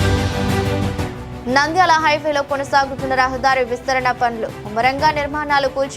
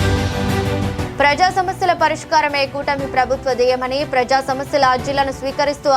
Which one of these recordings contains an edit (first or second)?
second